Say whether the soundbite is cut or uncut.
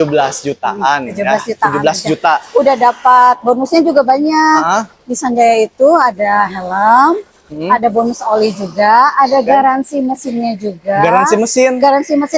uncut